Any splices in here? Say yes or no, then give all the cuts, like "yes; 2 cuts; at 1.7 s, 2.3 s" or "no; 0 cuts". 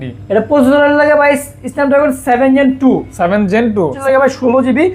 yes; 1 cut; at 4.0 s